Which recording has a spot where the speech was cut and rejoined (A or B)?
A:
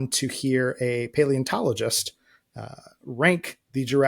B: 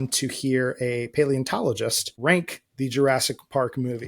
B